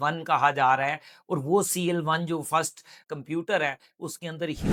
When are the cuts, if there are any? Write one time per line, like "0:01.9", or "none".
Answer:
none